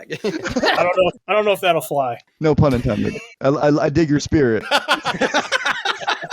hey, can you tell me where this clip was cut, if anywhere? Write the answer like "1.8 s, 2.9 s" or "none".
1.2 s, 2.3 s, 3.3 s, 4.7 s